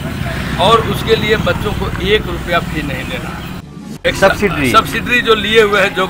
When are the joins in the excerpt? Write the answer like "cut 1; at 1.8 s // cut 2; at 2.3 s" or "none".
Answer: cut 1; at 3.8 s